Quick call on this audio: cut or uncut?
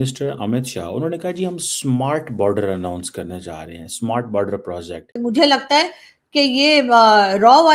cut